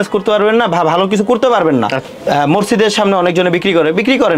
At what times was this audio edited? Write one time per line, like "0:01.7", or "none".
0:02.1

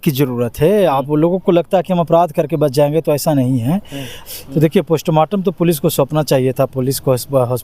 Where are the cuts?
0:04.2

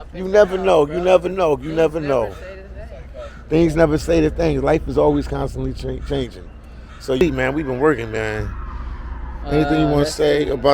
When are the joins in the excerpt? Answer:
0:07.2

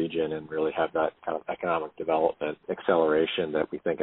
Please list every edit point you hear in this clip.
0:02.6

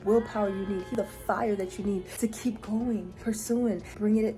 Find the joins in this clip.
0:00.9
0:02.1
0:03.3

